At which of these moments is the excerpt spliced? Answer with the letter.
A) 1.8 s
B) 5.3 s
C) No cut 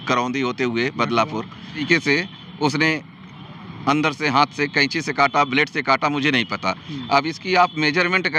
A